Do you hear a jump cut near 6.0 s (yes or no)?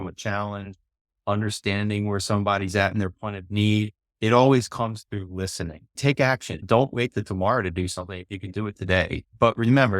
yes